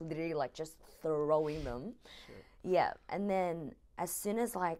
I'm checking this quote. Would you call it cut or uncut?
uncut